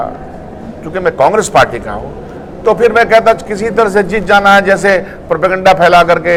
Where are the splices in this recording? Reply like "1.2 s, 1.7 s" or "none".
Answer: none